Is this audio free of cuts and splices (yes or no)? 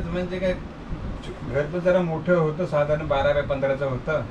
yes